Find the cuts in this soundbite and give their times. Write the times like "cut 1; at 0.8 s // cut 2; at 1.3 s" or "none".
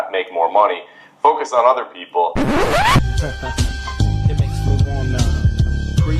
cut 1; at 2.3 s